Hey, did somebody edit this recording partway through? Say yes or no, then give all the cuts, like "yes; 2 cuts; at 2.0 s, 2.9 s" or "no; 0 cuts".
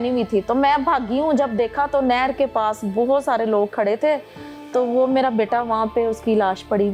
no; 0 cuts